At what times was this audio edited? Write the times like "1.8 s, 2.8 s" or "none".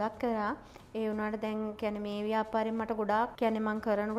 none